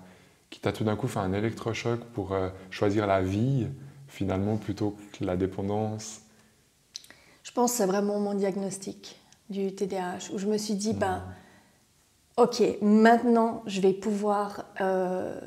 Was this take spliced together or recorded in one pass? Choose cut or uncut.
uncut